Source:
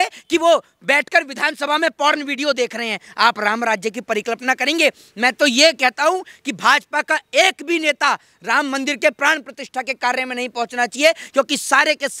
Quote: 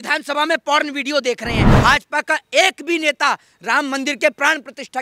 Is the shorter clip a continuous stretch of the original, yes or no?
no